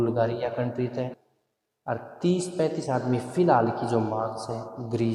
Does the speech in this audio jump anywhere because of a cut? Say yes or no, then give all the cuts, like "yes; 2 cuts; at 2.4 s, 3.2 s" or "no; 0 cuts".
yes; 1 cut; at 1.1 s